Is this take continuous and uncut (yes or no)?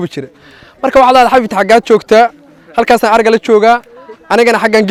yes